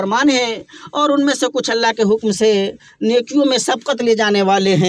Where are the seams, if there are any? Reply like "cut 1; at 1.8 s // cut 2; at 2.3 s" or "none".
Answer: none